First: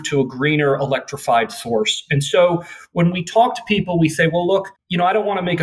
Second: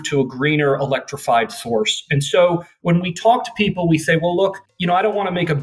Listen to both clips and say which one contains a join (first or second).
second